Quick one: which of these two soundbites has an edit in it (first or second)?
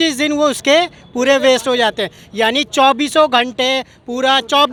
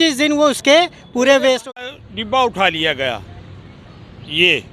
second